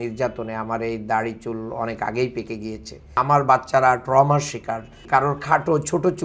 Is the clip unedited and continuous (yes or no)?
no